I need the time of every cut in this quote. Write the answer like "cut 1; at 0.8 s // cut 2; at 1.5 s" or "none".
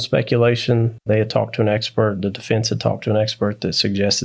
cut 1; at 0.9 s